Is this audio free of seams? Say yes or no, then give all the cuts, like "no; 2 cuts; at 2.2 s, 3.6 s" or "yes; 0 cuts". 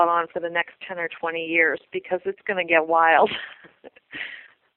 yes; 0 cuts